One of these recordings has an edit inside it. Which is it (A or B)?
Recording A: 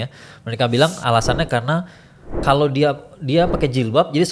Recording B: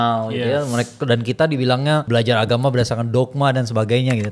B